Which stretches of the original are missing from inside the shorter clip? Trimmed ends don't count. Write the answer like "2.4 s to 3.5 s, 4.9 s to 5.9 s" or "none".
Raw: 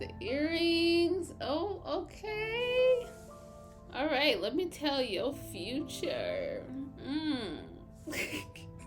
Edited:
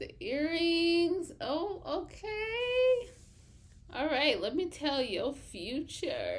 none

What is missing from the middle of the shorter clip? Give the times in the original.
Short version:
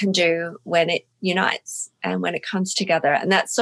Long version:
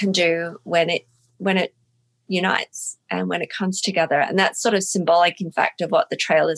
1.1 s to 2.2 s

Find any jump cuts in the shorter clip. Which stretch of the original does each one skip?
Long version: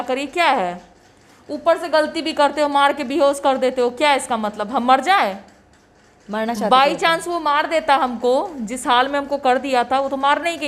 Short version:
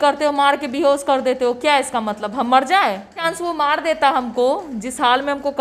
5.6 s to 7.1 s

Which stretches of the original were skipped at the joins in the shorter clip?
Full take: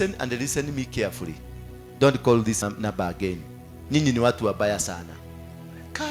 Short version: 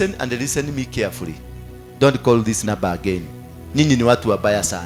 2.6 s to 2.8 s

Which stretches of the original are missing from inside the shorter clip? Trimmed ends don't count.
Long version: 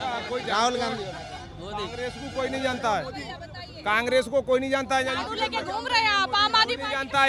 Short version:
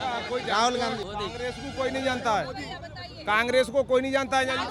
1.0 s to 1.6 s

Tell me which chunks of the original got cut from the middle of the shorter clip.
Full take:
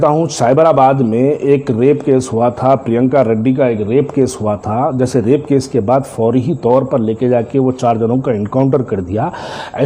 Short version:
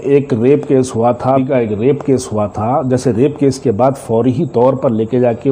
2.8 s to 3.5 s

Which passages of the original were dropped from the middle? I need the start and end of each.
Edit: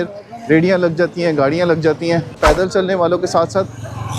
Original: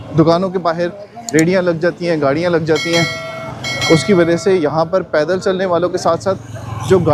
3.2 s to 5.1 s

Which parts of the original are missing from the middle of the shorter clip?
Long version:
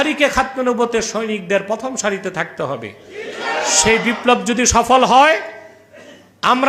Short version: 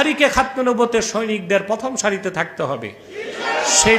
none

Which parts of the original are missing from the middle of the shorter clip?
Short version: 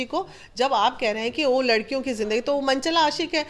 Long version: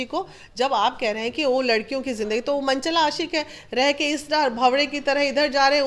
none

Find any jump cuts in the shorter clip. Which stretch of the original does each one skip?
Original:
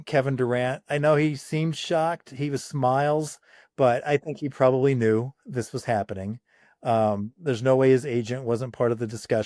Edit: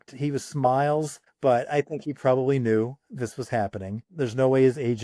3.4 s to 3.6 s, 6.4 s to 7.3 s

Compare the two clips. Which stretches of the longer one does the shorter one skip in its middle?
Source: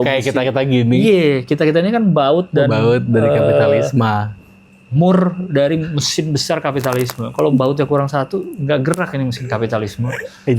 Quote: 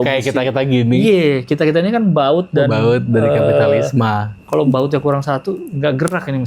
4.4 s to 7.2 s

